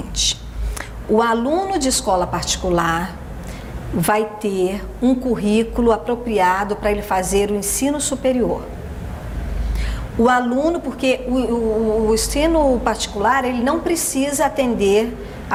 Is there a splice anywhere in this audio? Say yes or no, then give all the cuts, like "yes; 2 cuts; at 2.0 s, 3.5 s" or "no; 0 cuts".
no; 0 cuts